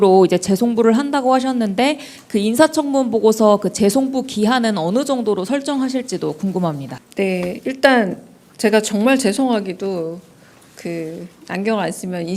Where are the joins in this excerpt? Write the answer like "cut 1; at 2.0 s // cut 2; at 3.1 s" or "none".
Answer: cut 1; at 7.0 s